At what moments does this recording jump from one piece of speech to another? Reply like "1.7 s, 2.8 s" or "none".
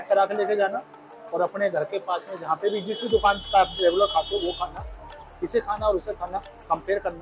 none